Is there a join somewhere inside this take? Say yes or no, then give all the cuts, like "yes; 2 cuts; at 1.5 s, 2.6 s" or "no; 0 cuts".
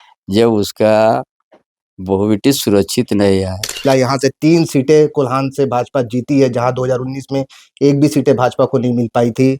yes; 1 cut; at 3.8 s